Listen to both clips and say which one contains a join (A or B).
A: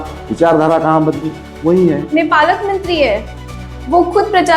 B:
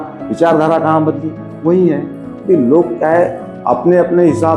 A